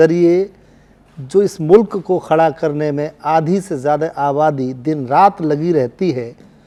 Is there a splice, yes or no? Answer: no